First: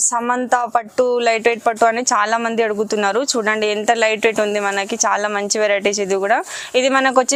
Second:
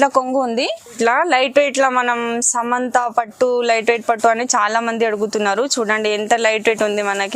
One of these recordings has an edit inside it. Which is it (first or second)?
second